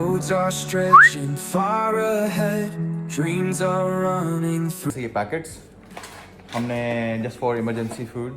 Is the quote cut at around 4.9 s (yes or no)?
yes